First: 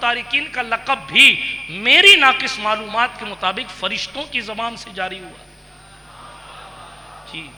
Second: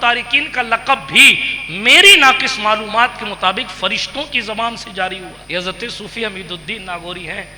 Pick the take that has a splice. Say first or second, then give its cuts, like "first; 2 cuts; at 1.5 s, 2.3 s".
second; 1 cut; at 5.4 s